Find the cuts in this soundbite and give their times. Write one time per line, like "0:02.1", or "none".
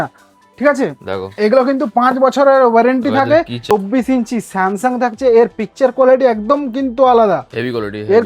0:03.6